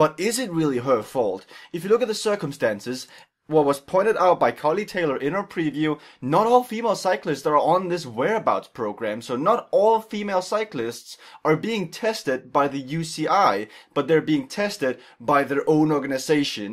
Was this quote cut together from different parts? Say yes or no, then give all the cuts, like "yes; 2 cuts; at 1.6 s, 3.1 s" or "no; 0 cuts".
yes; 1 cut; at 7.2 s